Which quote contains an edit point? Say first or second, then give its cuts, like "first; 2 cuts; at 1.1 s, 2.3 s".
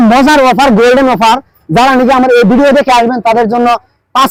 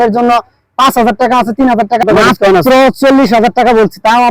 second; 1 cut; at 2.0 s